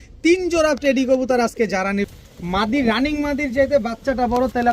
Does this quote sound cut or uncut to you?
cut